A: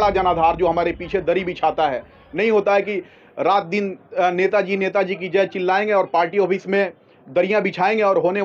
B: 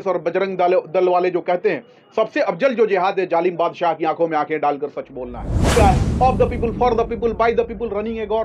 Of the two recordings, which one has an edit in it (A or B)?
B